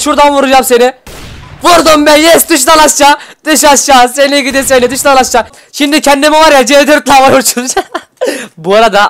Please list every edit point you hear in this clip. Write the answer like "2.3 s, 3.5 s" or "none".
5.6 s